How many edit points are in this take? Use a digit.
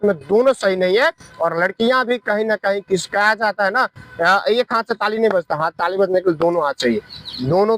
0